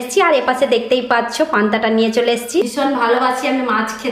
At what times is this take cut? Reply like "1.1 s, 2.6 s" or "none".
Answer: 2.7 s